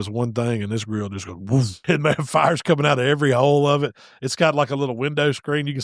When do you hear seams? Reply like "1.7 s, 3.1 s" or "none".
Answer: 1.8 s